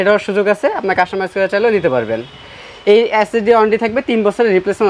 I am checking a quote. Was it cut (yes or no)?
no